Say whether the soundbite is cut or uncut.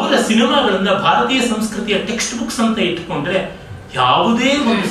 uncut